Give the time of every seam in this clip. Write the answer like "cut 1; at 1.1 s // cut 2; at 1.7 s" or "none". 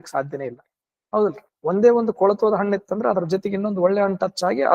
none